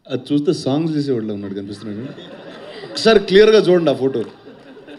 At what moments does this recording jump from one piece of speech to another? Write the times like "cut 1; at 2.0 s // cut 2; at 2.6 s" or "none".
none